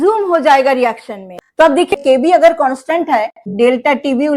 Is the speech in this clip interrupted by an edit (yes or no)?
yes